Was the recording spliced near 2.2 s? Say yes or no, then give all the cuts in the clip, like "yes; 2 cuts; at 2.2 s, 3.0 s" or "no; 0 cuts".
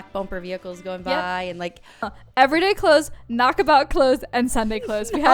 yes; 1 cut; at 2.2 s